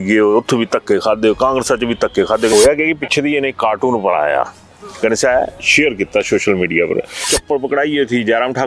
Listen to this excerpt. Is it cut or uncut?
cut